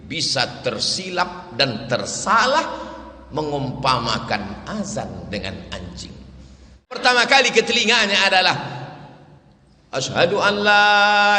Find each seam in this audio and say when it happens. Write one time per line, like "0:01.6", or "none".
0:07.0